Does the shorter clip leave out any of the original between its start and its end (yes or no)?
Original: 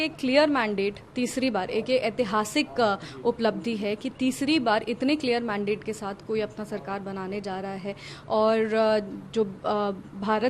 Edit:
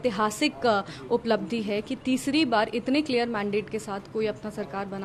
no